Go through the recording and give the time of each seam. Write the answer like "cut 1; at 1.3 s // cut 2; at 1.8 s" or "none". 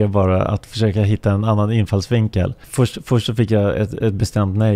cut 1; at 2.6 s